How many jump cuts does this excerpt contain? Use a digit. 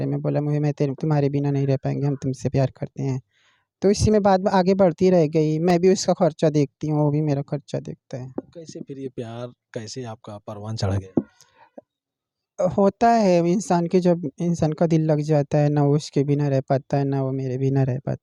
0